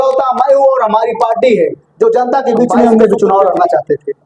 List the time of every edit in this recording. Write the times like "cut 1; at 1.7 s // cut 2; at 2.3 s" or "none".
cut 1; at 2.9 s